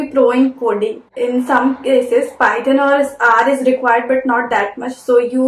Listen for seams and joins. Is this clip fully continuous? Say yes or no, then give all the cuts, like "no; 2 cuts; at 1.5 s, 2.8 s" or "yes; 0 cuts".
yes; 0 cuts